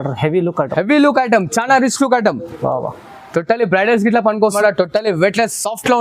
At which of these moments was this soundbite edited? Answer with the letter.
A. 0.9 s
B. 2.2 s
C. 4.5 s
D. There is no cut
C